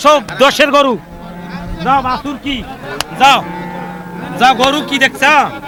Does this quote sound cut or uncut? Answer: uncut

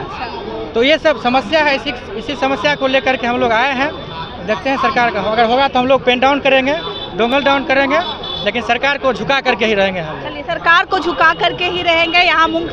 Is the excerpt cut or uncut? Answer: uncut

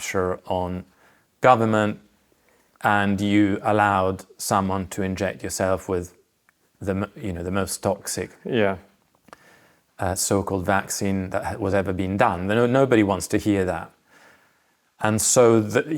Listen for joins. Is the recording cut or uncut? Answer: uncut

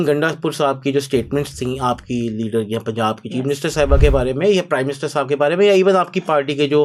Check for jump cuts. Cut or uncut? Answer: uncut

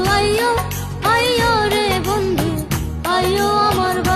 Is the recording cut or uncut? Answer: uncut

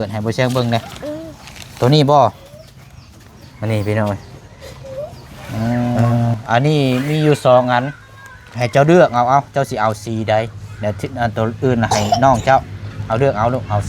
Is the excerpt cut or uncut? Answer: cut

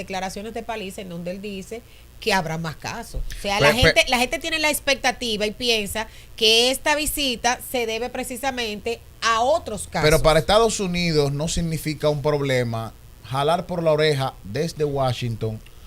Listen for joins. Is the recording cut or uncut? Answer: uncut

